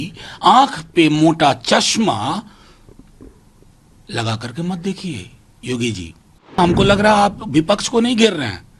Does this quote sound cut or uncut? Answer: cut